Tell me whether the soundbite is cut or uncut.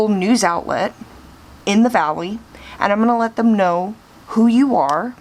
uncut